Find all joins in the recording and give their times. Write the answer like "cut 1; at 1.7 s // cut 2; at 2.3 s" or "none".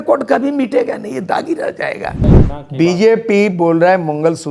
cut 1; at 2.3 s